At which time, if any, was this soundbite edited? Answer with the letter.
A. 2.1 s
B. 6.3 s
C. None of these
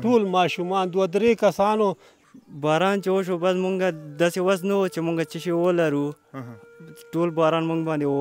A